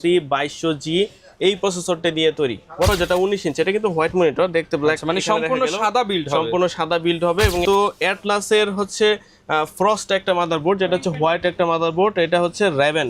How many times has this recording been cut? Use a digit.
2